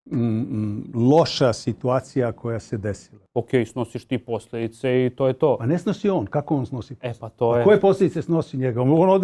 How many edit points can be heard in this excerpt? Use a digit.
1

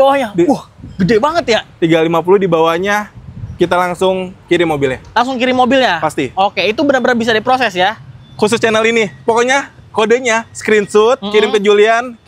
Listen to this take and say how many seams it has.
0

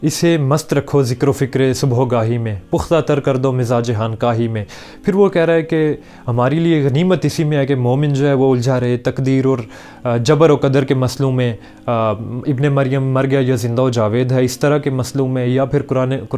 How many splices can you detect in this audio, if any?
0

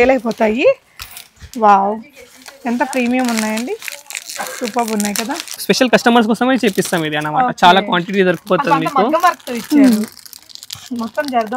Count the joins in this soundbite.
1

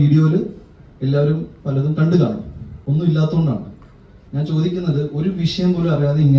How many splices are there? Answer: 0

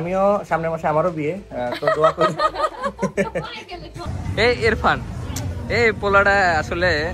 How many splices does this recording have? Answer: 1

